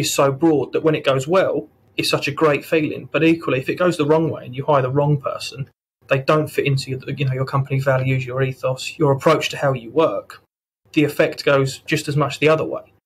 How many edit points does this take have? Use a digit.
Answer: 1